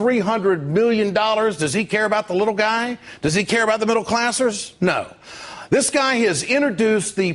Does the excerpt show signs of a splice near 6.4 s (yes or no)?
yes